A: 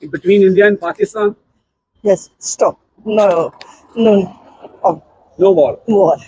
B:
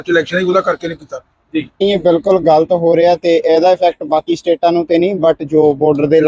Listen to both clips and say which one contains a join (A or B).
B